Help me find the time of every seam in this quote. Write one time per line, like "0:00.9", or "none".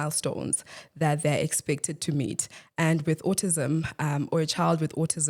none